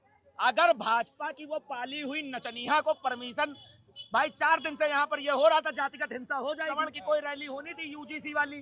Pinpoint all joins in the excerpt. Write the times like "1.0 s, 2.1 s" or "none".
6.7 s

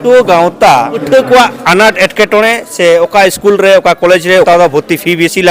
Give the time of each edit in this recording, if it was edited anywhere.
1.0 s, 4.5 s

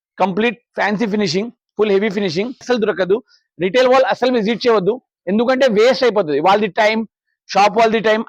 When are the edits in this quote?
2.6 s

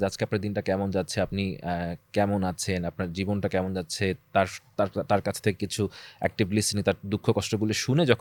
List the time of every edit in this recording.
none

